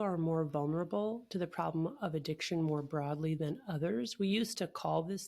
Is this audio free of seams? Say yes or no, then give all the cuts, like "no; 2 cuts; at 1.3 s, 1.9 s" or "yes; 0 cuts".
yes; 0 cuts